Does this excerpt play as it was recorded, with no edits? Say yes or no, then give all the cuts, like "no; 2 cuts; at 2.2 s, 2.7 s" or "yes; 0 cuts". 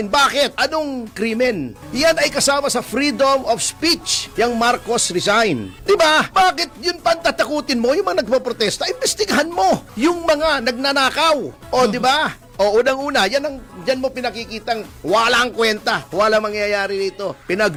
yes; 0 cuts